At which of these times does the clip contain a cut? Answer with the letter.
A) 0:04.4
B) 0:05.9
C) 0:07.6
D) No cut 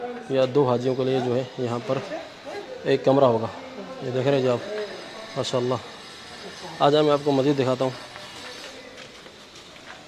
D